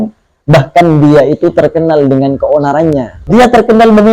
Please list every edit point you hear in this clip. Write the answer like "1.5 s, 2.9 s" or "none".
3.2 s